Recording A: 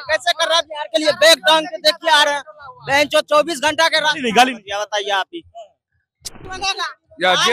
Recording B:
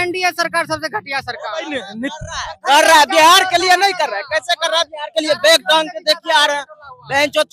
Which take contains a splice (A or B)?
A